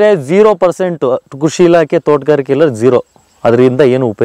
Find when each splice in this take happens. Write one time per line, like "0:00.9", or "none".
none